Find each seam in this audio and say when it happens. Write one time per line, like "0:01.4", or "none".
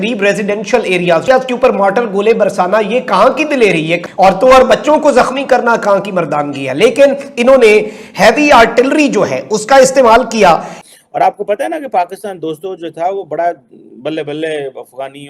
0:10.7